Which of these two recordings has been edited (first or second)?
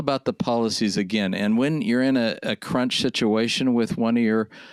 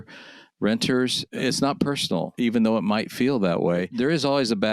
second